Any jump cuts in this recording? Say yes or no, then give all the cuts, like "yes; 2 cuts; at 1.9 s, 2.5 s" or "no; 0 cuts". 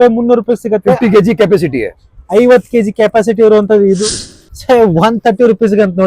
yes; 1 cut; at 4.0 s